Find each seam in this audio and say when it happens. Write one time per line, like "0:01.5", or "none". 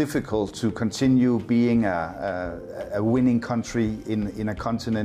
none